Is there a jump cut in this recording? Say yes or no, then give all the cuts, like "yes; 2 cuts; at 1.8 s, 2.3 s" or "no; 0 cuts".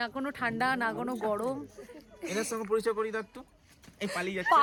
no; 0 cuts